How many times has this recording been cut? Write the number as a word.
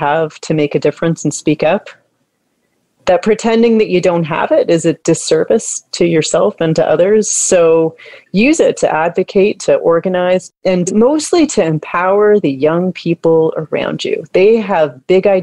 one